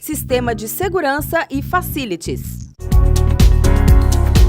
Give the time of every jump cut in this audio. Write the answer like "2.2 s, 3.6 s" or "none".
3.0 s